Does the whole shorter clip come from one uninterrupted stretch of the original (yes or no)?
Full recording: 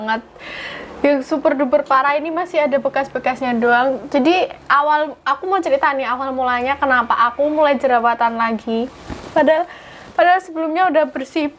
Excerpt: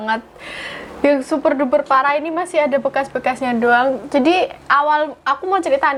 yes